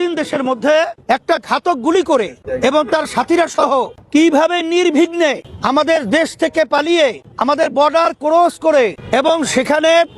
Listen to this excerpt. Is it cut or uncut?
cut